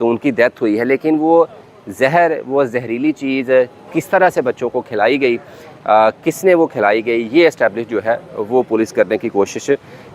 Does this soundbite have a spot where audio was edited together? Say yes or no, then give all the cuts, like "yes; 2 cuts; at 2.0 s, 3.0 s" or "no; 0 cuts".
no; 0 cuts